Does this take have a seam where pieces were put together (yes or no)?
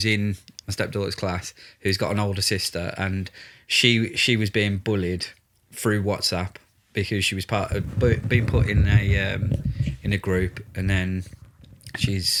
no